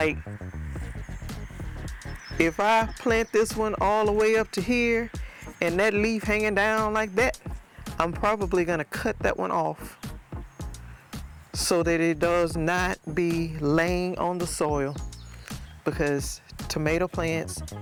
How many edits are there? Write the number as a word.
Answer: zero